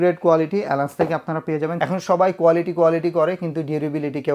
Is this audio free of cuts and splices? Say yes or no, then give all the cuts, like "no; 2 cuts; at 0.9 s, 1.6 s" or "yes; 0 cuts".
no; 1 cut; at 1.8 s